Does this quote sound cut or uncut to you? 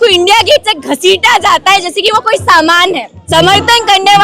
cut